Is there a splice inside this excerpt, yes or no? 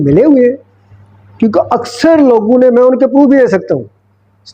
no